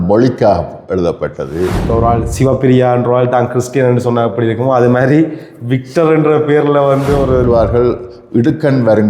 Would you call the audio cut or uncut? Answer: cut